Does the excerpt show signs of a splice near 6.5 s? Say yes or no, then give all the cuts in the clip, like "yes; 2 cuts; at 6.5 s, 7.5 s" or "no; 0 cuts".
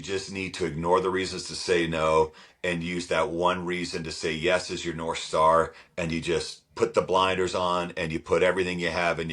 no; 0 cuts